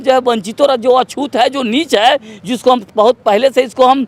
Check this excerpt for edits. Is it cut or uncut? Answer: uncut